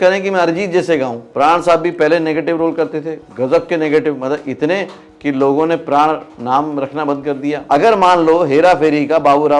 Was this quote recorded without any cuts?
no; 2 cuts; at 1.2 s, 7.6 s

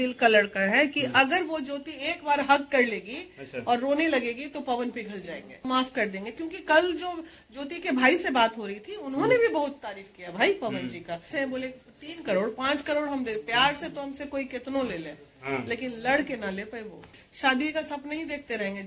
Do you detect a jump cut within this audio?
yes; 3 cuts; at 5.6 s, 11.3 s, 17.2 s

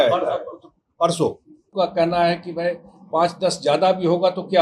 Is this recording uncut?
no; 1 cut; at 1.7 s

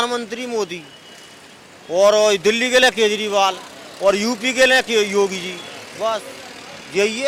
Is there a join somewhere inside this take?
no; 0 cuts

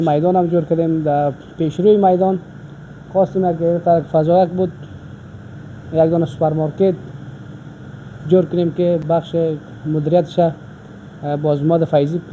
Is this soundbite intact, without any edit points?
yes; 0 cuts

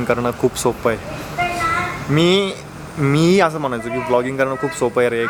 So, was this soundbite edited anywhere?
no; 0 cuts

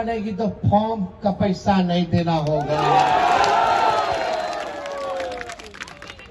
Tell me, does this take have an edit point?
no; 0 cuts

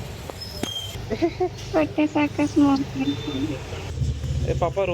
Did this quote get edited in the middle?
yes; 1 cut; at 3.9 s

